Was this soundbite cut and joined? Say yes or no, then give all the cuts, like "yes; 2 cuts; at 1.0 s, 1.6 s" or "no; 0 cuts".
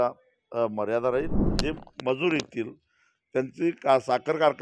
yes; 1 cut; at 1.5 s